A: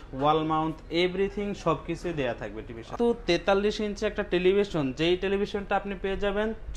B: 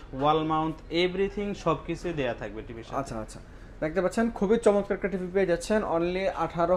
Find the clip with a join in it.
A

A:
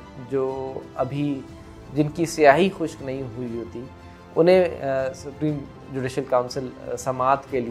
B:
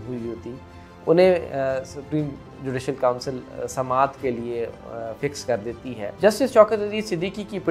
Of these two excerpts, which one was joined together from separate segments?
B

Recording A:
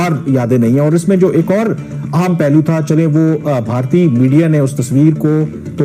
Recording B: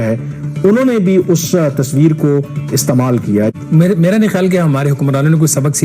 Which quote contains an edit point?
B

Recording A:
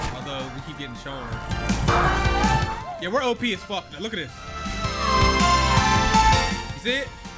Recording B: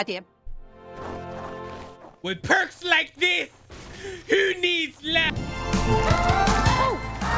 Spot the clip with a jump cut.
B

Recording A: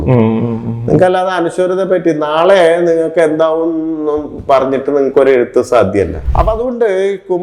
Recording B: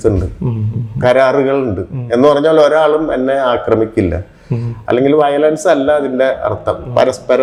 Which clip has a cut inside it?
A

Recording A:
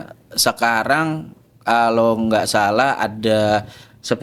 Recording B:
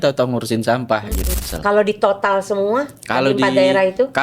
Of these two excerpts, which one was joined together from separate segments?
B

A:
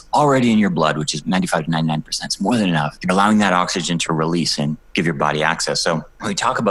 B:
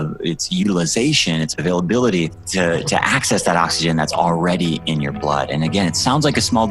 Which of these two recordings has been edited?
A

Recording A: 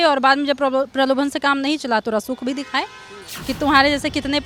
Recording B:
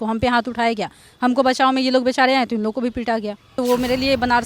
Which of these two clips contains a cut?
B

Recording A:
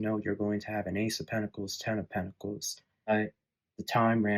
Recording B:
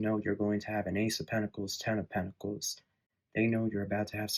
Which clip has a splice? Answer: A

